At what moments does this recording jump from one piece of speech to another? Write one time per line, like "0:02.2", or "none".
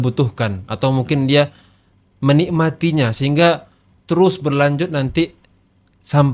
none